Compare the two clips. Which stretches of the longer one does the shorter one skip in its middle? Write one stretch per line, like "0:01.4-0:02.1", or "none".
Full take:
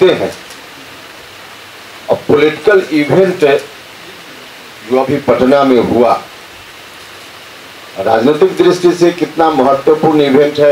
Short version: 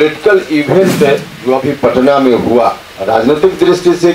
0:03.7-0:04.8
0:06.3-0:07.9